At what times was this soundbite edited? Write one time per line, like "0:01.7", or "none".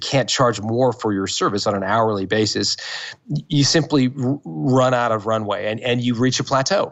none